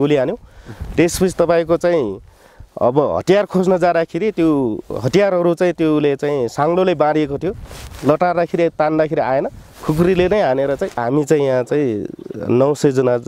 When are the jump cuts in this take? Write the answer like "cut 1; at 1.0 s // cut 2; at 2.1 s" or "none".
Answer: cut 1; at 11.0 s